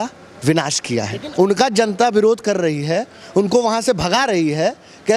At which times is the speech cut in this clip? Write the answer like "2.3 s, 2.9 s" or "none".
1.2 s